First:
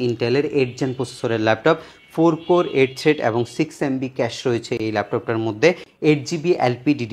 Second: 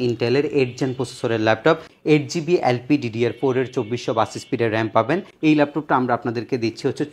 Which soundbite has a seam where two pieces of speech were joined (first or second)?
second